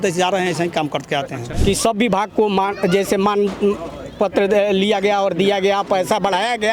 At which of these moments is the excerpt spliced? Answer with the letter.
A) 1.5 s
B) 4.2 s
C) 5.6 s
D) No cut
A